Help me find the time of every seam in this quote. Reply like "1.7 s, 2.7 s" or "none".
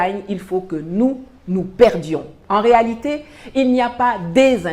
2.3 s